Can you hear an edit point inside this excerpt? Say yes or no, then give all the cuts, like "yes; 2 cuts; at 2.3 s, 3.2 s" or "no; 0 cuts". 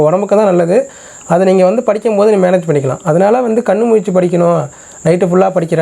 no; 0 cuts